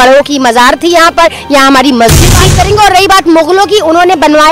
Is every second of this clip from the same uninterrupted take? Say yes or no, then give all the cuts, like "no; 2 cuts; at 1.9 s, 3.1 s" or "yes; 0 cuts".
no; 1 cut; at 2.5 s